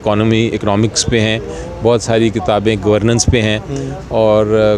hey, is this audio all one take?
yes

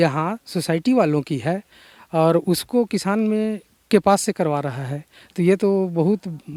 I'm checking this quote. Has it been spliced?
no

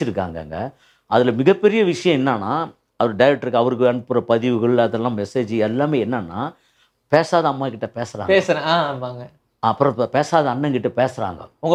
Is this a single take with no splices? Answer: yes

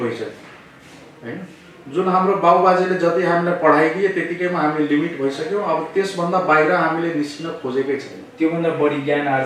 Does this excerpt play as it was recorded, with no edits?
yes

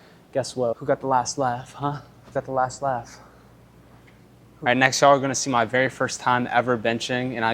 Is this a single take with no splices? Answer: no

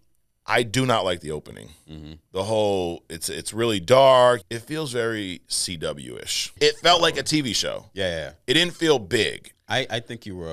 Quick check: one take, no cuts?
no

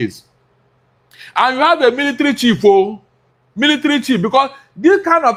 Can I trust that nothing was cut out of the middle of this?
yes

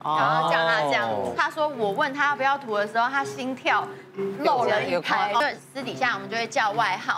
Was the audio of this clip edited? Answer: yes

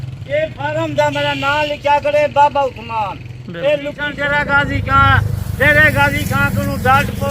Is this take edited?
yes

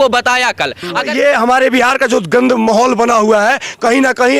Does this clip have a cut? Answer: yes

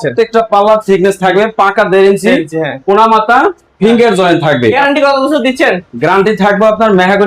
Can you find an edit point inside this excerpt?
yes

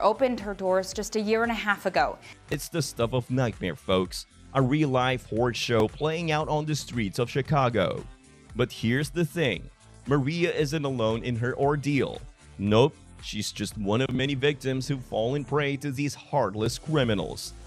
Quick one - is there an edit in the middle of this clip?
no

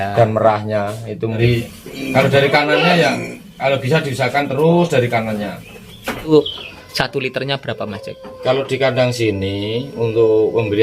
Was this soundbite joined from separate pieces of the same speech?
yes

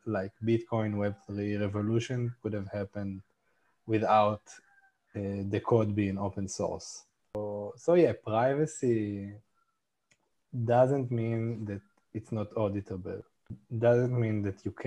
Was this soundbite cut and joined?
yes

